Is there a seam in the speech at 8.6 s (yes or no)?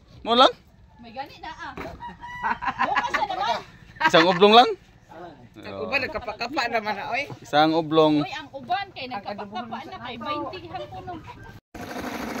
no